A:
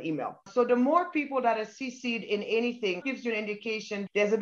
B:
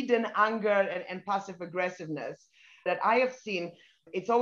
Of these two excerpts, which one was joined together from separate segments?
B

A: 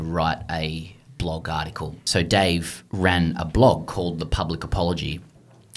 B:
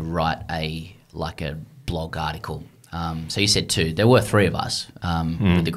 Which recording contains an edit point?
A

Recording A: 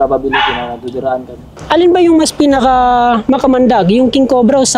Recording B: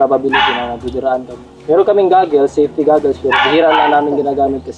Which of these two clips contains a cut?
A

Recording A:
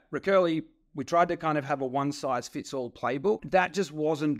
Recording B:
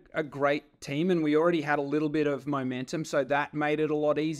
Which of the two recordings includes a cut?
A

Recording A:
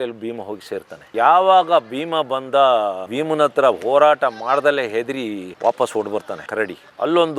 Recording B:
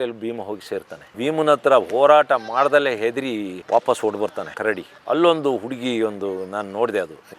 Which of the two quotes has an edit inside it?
B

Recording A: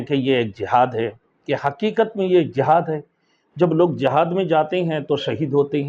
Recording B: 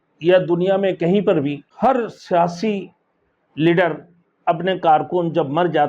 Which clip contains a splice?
B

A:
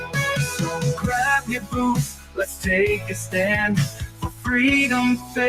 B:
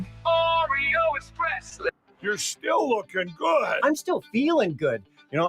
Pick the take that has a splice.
B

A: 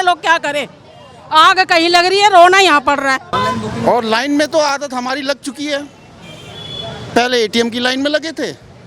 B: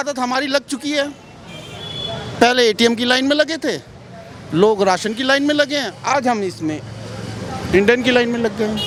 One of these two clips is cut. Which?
A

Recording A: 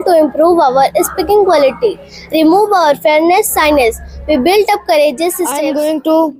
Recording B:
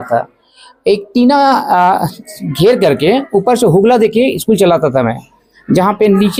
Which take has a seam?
A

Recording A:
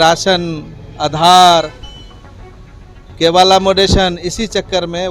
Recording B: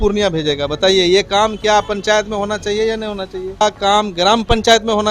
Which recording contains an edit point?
B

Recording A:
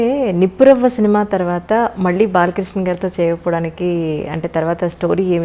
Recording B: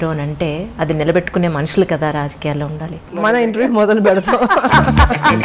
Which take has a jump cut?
B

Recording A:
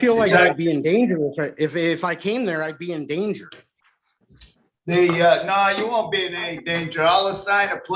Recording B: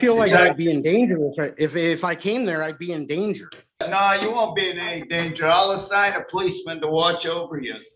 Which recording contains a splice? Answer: B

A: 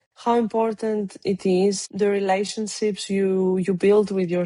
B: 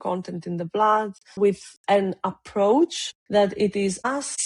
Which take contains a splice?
B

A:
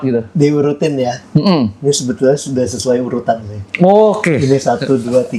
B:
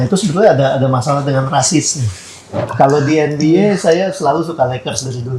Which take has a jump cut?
B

